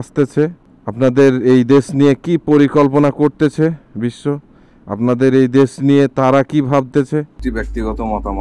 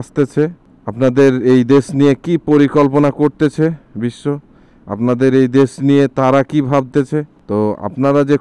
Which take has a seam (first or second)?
first